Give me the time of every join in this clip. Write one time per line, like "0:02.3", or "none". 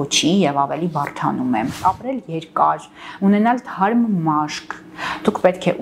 0:01.7